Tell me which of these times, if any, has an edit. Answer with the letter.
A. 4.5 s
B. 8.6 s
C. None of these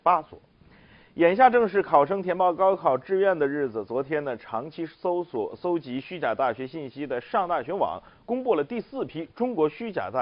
B